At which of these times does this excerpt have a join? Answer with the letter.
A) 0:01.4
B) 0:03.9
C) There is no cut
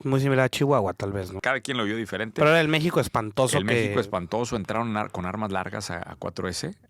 A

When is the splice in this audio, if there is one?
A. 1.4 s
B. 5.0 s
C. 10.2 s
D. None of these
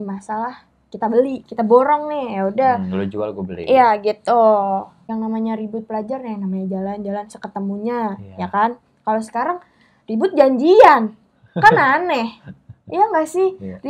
B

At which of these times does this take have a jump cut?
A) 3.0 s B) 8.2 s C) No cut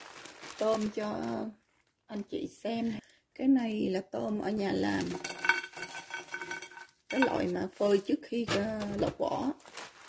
A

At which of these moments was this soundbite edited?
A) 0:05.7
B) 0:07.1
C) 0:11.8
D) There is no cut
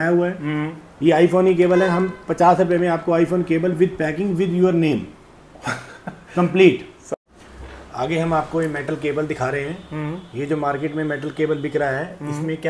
D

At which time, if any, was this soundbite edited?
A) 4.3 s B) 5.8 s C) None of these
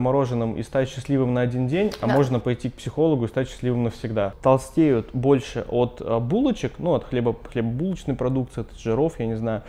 A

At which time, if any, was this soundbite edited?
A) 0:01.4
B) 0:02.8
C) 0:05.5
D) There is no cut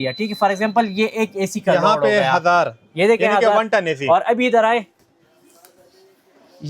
D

